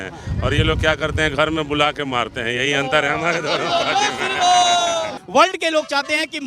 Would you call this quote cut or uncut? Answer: cut